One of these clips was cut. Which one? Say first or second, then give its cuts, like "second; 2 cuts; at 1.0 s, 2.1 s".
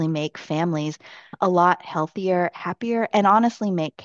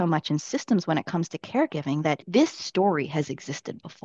second; 1 cut; at 2.2 s